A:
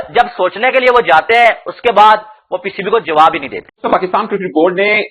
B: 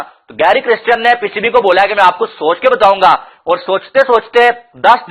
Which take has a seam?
A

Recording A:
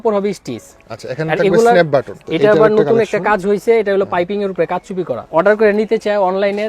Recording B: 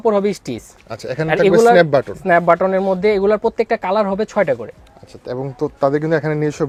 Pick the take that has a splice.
A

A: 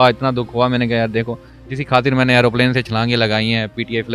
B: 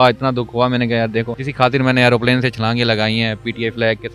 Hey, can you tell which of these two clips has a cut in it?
B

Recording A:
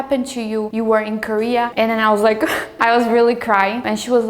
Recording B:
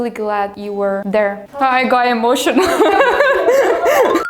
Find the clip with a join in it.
A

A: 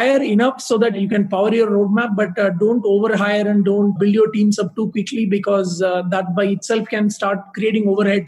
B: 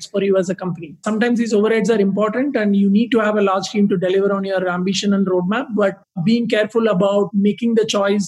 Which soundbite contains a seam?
B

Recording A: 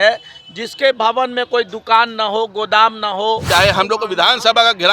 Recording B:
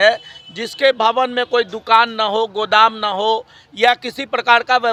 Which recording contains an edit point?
A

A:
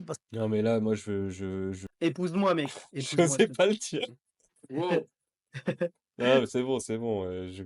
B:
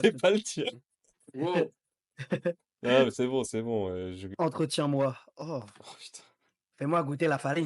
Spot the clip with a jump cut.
A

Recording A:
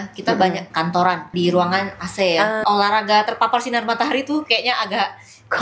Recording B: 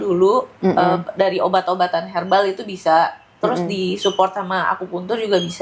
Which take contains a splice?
A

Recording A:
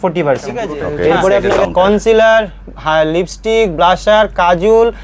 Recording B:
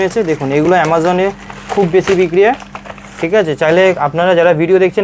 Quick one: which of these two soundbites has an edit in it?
A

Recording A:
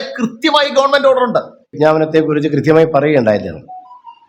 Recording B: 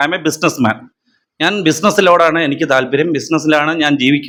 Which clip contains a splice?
A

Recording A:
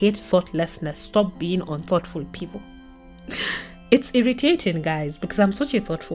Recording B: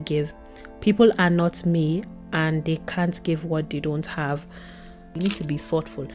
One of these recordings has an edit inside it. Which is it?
B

